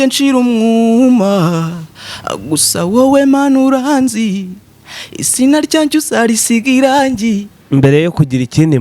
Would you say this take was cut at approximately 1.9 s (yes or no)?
no